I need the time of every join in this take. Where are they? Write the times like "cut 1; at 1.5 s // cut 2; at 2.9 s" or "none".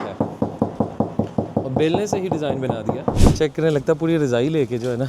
cut 1; at 3.3 s